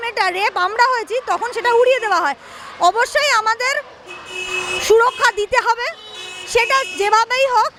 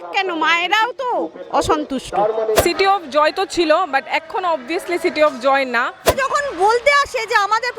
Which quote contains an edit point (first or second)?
second